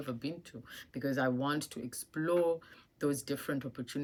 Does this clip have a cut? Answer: no; 0 cuts

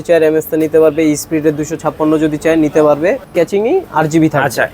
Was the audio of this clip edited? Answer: yes; 1 cut; at 3.2 s

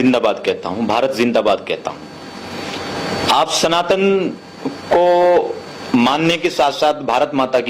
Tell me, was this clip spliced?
no; 0 cuts

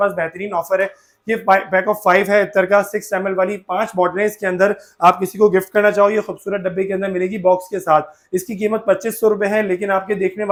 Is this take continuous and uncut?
yes; 0 cuts

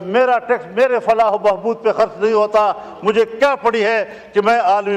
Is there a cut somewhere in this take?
no; 0 cuts

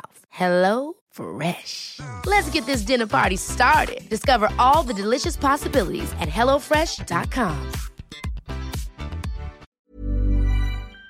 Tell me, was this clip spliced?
yes; 1 cut; at 9.7 s

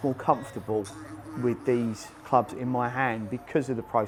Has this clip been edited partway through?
no; 0 cuts

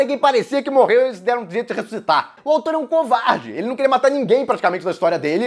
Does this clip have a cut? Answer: no; 0 cuts

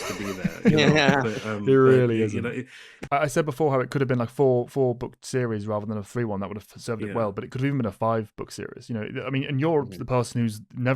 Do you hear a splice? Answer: yes; 1 cut; at 3.1 s

